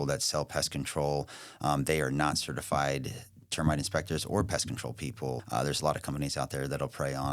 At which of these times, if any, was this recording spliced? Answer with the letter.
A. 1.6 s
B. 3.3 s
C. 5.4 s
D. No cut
C